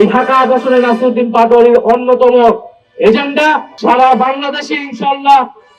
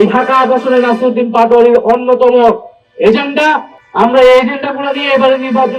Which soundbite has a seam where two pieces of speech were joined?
first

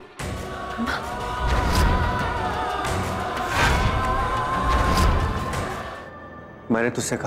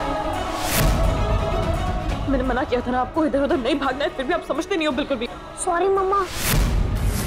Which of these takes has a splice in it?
first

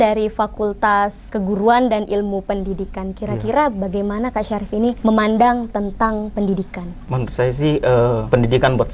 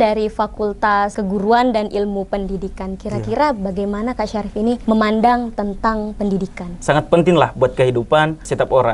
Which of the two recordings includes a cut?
second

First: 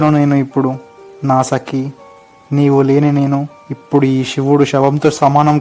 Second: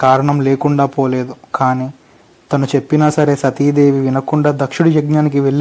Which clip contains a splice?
first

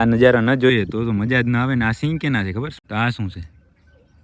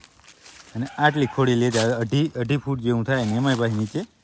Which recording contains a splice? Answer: first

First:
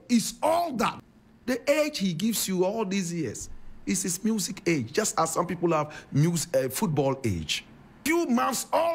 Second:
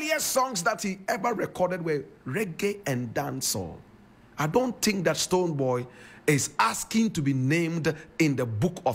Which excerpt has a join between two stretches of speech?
first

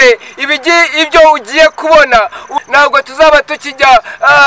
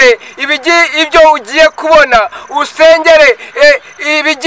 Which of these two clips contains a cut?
first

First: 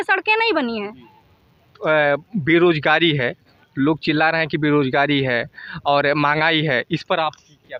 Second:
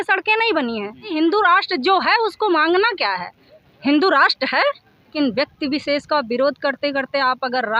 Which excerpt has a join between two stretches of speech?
second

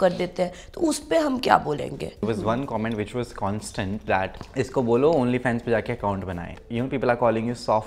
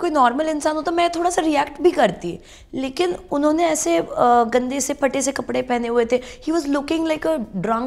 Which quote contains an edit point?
first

